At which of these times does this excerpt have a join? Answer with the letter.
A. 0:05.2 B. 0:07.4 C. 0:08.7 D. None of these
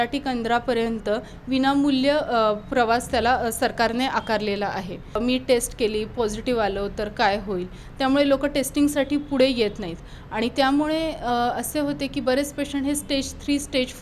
A